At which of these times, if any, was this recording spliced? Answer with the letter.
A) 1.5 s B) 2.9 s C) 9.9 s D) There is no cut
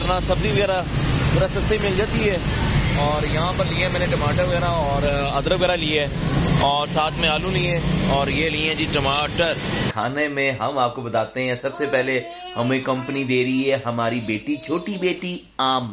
C